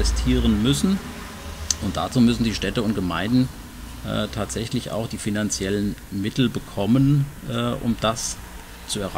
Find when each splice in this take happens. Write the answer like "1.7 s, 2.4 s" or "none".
none